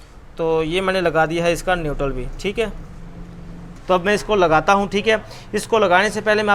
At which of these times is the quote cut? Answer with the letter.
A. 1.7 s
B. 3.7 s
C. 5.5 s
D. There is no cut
B